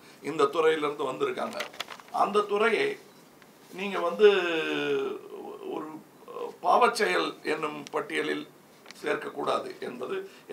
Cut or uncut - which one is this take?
uncut